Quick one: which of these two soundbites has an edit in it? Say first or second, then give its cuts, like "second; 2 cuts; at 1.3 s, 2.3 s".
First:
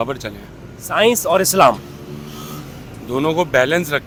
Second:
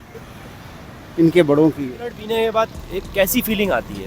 second; 1 cut; at 1.9 s